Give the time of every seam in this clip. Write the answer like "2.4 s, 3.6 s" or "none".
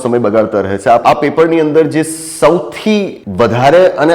1.0 s, 3.2 s